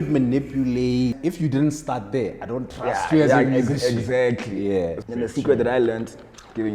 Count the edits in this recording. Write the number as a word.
two